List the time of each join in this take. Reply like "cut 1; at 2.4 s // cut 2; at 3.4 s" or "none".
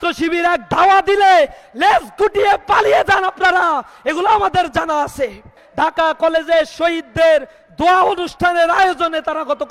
cut 1; at 5.6 s